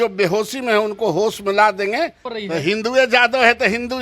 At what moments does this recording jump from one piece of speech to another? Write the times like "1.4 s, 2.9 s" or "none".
1.9 s

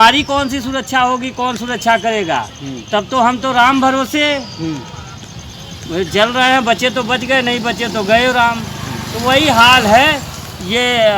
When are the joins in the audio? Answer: none

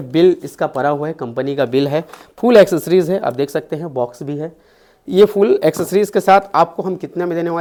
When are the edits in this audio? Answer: none

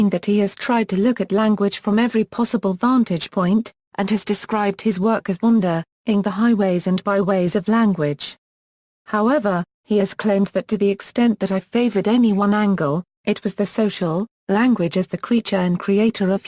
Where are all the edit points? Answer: 1.4 s

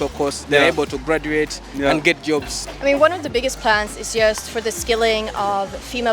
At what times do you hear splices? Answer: 2.6 s

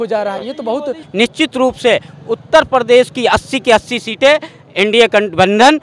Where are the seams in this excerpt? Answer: 1.1 s

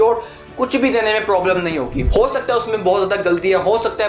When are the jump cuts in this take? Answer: 2.0 s

